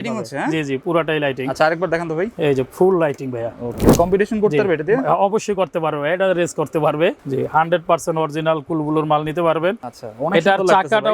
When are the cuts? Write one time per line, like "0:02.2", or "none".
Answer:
0:03.9
0:07.2
0:09.9